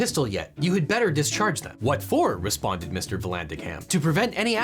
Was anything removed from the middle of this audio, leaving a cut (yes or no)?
no